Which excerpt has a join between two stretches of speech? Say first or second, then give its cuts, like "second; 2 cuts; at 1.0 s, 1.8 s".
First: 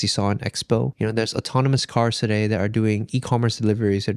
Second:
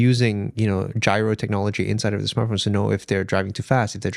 first; 1 cut; at 0.9 s